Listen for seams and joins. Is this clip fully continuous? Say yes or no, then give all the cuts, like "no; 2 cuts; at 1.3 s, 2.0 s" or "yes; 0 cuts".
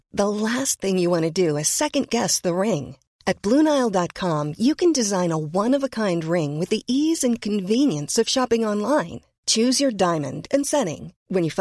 yes; 0 cuts